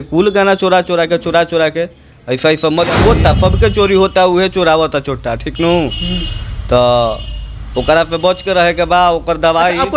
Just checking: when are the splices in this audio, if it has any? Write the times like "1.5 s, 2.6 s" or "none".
3.0 s